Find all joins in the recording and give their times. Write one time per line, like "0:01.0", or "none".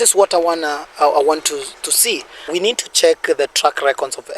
0:02.5